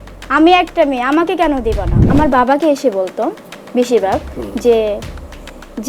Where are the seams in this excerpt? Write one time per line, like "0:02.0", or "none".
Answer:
0:02.0